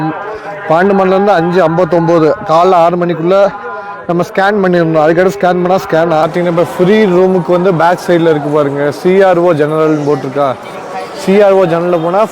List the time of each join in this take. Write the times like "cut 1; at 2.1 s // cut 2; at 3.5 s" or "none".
cut 1; at 6.2 s